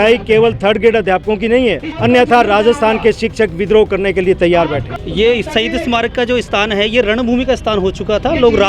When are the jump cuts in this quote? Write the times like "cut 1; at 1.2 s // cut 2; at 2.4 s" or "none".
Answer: cut 1; at 1.9 s // cut 2; at 4.9 s